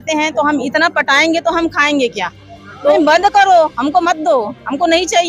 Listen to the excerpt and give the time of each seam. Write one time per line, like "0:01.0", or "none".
0:02.9